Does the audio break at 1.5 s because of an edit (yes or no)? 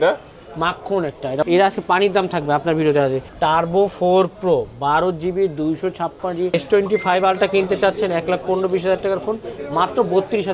yes